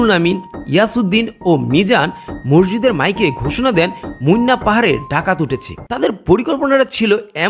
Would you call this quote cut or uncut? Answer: uncut